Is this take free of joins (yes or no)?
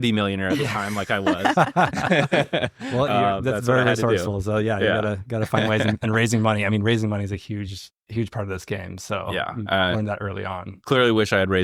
yes